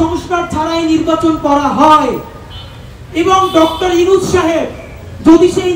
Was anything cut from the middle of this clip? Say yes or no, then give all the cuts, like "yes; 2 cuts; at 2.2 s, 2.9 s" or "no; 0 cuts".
no; 0 cuts